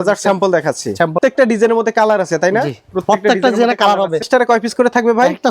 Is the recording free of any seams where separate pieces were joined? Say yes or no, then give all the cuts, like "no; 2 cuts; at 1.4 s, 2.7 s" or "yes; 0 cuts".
no; 2 cuts; at 1.2 s, 4.3 s